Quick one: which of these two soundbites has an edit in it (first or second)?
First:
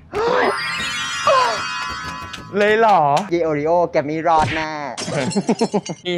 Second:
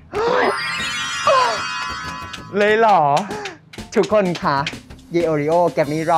first